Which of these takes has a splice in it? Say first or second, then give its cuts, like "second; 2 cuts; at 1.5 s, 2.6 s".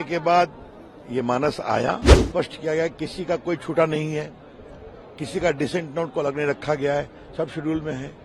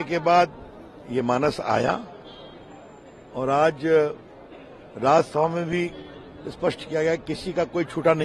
first; 1 cut; at 2.2 s